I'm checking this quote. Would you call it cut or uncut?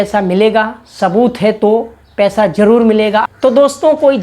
cut